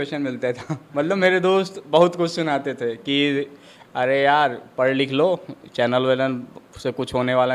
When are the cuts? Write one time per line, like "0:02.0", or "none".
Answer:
none